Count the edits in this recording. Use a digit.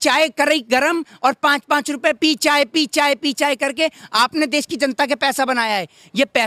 0